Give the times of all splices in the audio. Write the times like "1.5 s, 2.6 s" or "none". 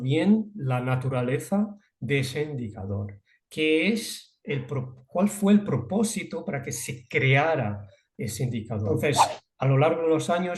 9.1 s